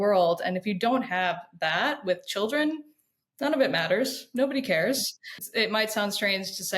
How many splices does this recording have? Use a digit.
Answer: 1